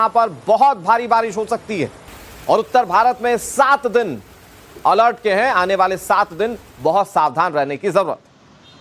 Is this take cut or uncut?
uncut